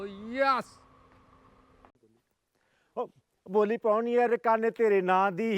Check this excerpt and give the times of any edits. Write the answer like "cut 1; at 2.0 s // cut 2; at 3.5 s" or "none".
cut 1; at 1.9 s